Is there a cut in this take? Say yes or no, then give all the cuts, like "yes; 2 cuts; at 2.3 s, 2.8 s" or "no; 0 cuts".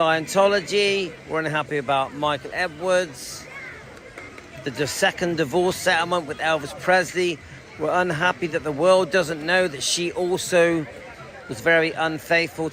no; 0 cuts